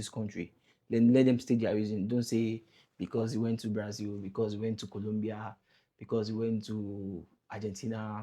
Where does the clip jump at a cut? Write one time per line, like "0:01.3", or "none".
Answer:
none